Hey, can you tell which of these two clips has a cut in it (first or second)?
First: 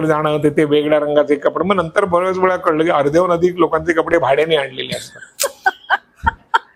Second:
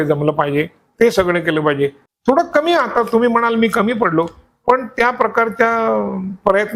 second